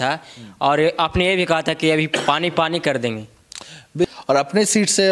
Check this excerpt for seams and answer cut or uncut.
cut